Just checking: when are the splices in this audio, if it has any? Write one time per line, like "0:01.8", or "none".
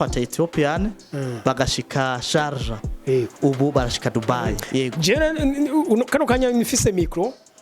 0:04.6